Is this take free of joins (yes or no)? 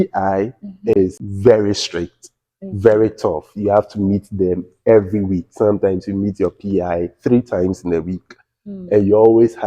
no